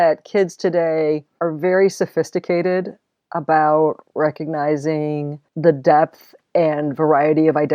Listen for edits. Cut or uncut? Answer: cut